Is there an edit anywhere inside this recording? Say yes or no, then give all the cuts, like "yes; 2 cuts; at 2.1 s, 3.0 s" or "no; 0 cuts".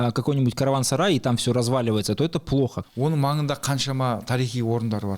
yes; 1 cut; at 2.8 s